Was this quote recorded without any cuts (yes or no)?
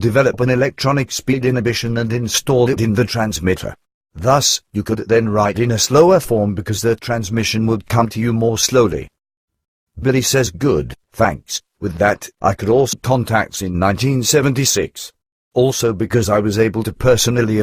yes